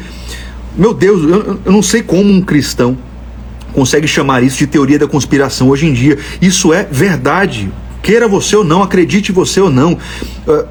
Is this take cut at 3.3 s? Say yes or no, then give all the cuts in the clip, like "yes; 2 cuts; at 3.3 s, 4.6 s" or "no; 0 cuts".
no; 0 cuts